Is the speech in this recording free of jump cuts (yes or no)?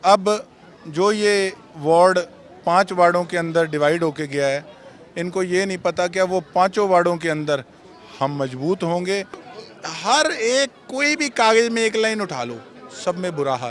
no